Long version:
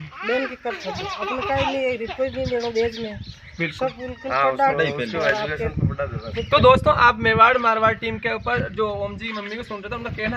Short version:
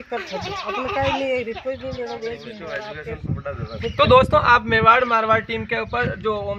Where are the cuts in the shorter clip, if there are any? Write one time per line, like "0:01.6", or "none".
0:02.9